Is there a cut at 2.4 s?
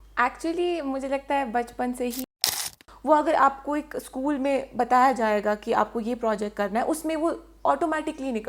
yes; 1 cut; at 2.4 s

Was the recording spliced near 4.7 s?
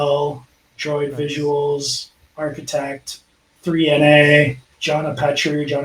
yes; 1 cut; at 4.7 s

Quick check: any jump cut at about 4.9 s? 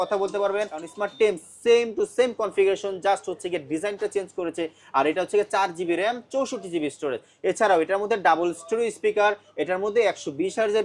no; 1 cut; at 1.0 s

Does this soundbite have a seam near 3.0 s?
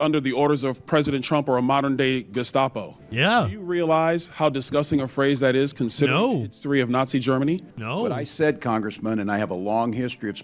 yes; 2 cuts; at 3.0 s, 7.8 s

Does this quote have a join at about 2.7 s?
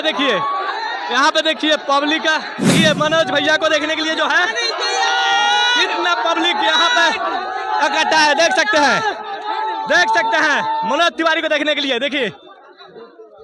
yes; 1 cut; at 2.7 s

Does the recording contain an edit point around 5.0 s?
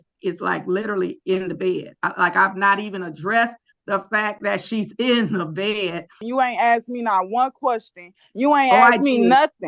no; 1 cut; at 6.2 s

